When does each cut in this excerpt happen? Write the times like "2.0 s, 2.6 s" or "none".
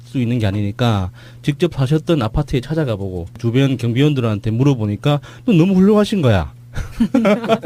none